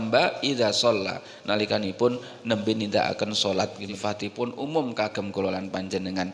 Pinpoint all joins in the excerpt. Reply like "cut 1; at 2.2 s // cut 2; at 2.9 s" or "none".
cut 1; at 3.9 s